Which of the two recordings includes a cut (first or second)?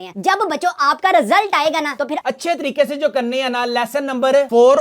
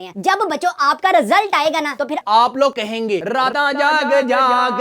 first